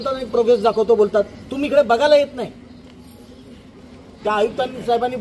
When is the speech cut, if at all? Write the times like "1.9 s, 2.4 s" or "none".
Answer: 4.2 s